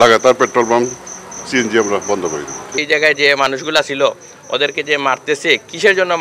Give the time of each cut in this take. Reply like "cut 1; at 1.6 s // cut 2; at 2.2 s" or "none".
cut 1; at 2.8 s